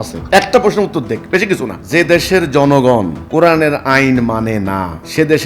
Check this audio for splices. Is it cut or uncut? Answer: cut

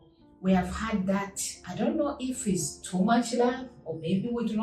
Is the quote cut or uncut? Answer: uncut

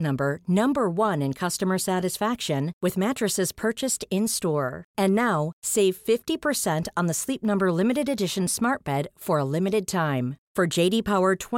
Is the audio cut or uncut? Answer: uncut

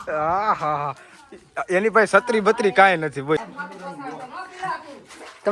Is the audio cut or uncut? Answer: cut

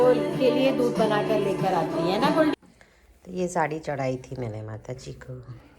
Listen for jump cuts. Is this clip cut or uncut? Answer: cut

